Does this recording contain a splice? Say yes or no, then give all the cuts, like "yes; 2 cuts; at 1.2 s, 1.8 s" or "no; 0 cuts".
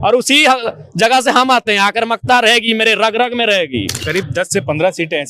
yes; 1 cut; at 4.0 s